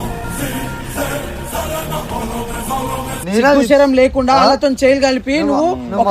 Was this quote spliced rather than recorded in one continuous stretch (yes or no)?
yes